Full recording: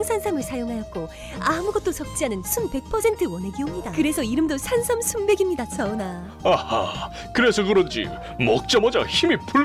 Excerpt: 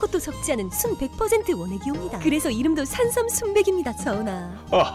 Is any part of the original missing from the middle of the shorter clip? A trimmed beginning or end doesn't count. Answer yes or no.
no